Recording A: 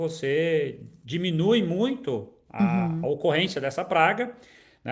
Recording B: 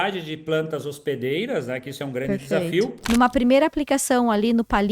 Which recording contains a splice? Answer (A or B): B